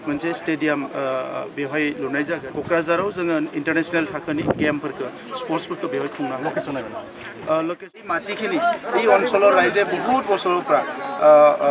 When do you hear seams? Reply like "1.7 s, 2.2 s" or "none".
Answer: 2.5 s, 8.1 s